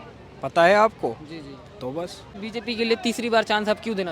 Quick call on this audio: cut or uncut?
cut